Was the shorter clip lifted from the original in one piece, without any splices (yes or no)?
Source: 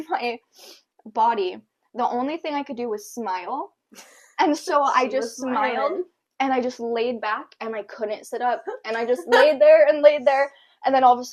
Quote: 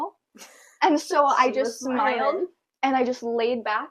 yes